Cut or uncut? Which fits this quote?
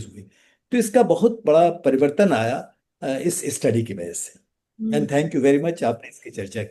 uncut